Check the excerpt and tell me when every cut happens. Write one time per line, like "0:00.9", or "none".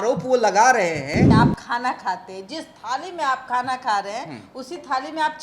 0:01.2